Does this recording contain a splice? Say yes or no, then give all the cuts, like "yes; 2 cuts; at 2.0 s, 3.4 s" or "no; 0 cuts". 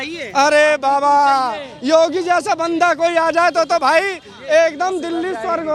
no; 0 cuts